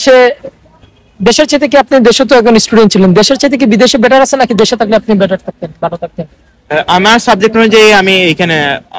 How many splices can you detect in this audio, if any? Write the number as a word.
zero